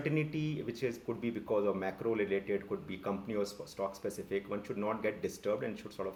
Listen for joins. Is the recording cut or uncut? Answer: uncut